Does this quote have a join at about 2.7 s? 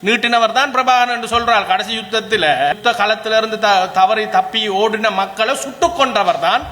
yes; 1 cut; at 2.7 s

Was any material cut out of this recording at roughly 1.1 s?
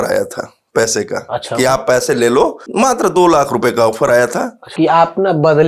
no; 2 cuts; at 2.6 s, 4.7 s

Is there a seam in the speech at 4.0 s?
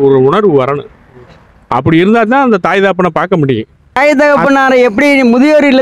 yes; 1 cut; at 4.0 s

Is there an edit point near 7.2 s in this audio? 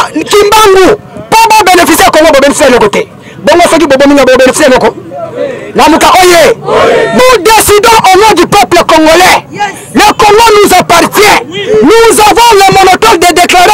yes; 1 cut; at 7.2 s

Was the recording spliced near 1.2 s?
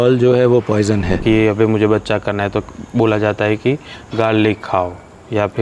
yes; 1 cut; at 1.2 s

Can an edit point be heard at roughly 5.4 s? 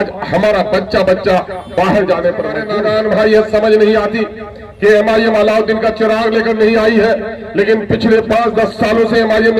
no; 1 cut; at 2.6 s

